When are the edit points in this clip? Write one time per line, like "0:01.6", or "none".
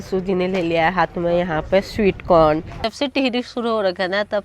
0:02.8